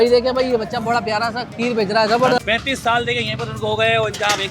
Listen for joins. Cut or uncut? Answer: cut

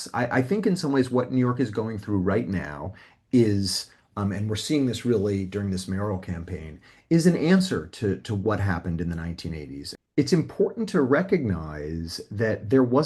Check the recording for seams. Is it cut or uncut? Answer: cut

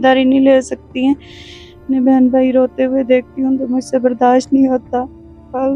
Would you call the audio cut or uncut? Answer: cut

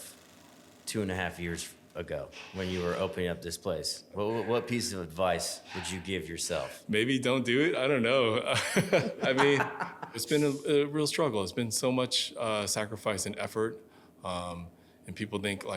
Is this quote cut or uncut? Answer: cut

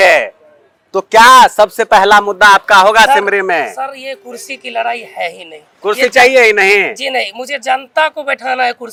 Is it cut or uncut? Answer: uncut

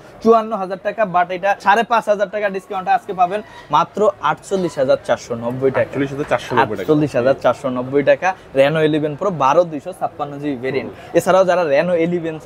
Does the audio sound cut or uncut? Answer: uncut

